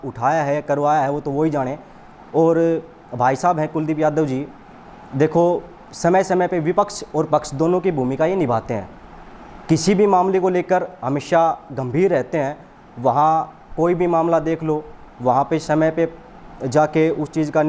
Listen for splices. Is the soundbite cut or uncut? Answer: uncut